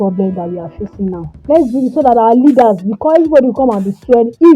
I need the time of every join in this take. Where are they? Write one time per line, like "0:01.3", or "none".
0:01.3